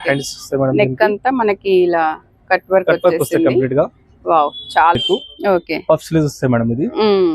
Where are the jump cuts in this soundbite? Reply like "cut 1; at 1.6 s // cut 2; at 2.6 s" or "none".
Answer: cut 1; at 5.0 s